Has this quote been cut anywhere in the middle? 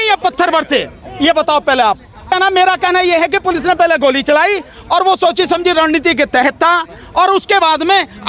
yes; 1 cut; at 2.5 s

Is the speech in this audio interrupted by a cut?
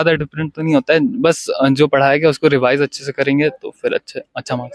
no; 0 cuts

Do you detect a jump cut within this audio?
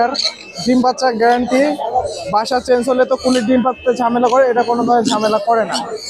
no; 0 cuts

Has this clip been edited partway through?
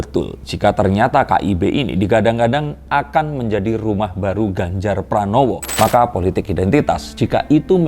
yes; 1 cut; at 5.7 s

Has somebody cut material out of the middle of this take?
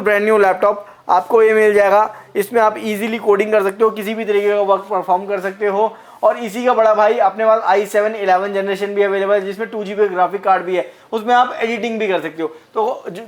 no; 0 cuts

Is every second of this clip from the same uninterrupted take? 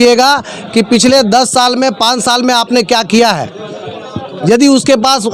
yes; 0 cuts

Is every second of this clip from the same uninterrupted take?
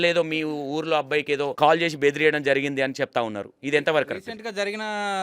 no; 1 cut; at 1.5 s

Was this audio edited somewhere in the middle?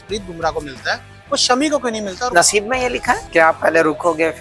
yes; 2 cuts; at 2.1 s, 3.2 s

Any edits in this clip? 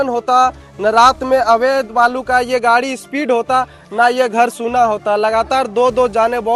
no; 0 cuts

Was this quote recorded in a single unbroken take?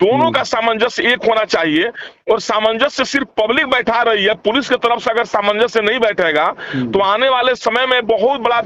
yes; 0 cuts

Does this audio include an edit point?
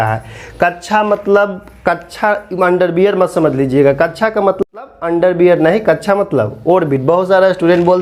yes; 1 cut; at 4.6 s

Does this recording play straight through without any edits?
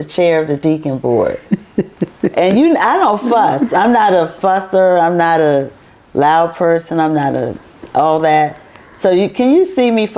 yes; 0 cuts

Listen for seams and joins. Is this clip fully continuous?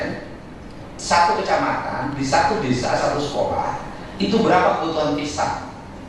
yes; 0 cuts

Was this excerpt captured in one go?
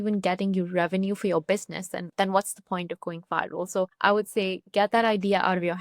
no; 2 cuts; at 2.0 s, 3.9 s

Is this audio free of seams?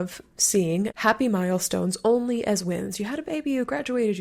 no; 1 cut; at 0.9 s

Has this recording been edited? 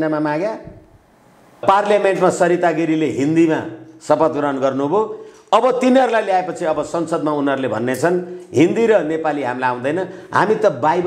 yes; 1 cut; at 1.6 s

